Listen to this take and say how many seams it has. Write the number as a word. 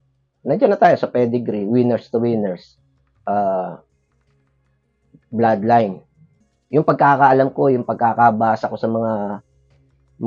one